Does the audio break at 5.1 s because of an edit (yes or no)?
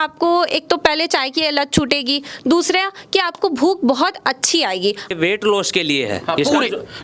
yes